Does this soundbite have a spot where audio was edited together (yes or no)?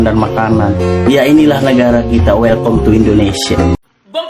no